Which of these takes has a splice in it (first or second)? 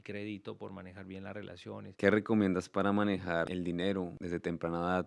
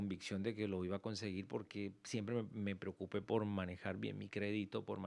first